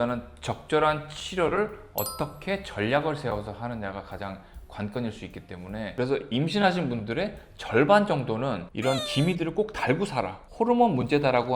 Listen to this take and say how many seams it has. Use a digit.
1